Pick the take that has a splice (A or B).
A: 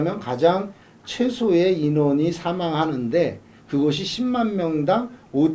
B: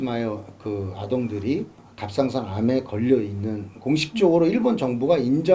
B